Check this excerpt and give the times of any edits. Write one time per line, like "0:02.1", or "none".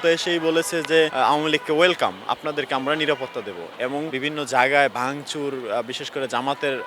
0:01.1
0:04.1